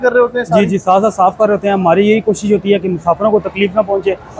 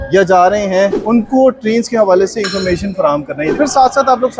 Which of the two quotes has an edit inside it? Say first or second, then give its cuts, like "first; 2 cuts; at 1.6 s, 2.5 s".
second; 2 cuts; at 1.0 s, 3.5 s